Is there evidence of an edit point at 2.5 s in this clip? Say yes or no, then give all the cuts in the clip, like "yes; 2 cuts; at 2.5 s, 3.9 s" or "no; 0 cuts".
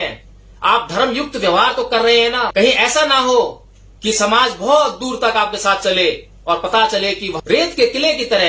yes; 2 cuts; at 2.5 s, 7.4 s